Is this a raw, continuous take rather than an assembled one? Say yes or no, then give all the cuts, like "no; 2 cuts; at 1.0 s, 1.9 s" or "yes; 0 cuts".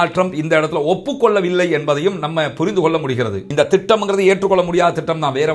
no; 1 cut; at 3.3 s